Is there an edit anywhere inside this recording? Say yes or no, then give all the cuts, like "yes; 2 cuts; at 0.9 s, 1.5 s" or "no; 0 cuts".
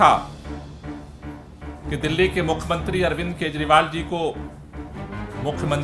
no; 0 cuts